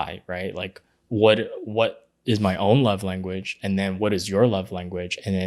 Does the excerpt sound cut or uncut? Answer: uncut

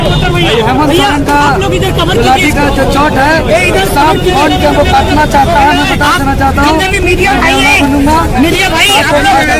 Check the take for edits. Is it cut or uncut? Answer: uncut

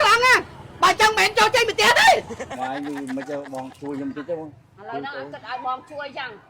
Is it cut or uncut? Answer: cut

